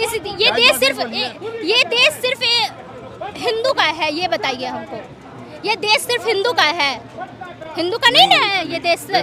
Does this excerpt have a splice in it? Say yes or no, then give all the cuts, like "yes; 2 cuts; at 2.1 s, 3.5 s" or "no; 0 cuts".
no; 0 cuts